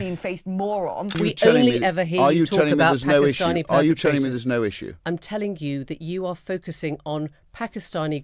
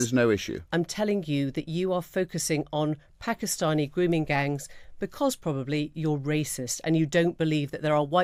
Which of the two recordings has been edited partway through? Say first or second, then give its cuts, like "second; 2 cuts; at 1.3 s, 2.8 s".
first; 1 cut; at 1.2 s